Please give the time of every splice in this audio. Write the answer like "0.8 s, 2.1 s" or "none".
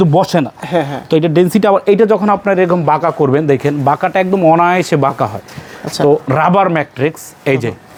none

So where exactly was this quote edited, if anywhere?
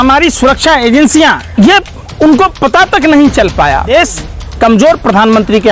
1.4 s, 3.9 s

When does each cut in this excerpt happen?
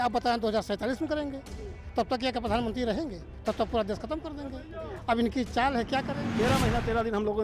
6.2 s

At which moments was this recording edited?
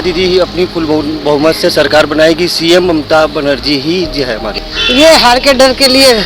4.6 s

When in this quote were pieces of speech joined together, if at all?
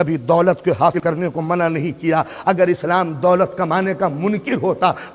1.0 s

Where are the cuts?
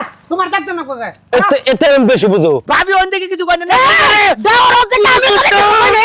2.7 s

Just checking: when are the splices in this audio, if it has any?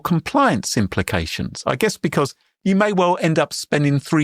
2.5 s

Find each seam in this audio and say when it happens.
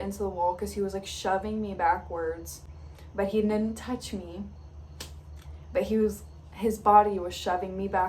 none

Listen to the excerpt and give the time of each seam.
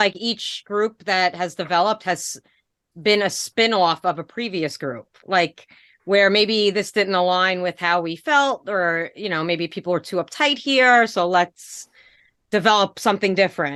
none

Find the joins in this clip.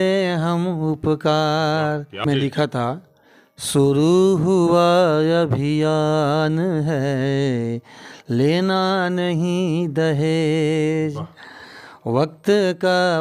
2.2 s

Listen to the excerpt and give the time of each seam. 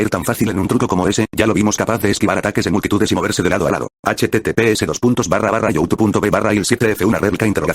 3.9 s, 6.4 s

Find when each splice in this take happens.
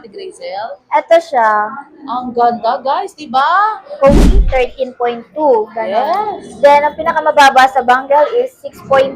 4.2 s

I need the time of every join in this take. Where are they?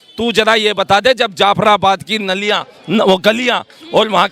none

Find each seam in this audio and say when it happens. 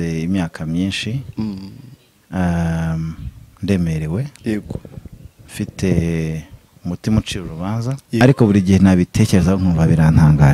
8.2 s

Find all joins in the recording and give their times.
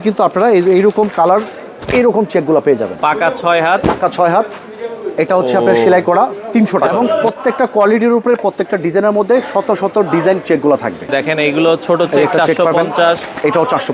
2.9 s, 6.9 s, 11.1 s

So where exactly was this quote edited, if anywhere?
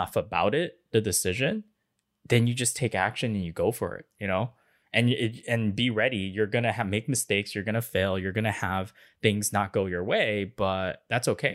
none

